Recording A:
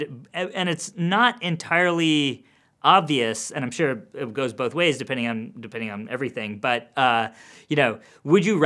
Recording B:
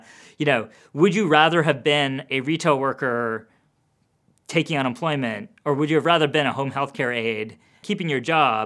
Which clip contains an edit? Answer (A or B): B